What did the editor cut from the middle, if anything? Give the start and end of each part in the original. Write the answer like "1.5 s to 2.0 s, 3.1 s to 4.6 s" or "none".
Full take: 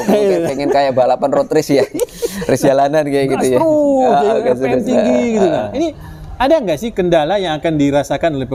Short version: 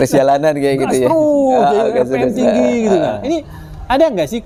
none